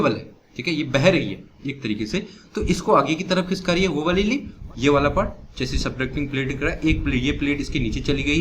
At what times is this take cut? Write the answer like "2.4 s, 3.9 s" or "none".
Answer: 4.6 s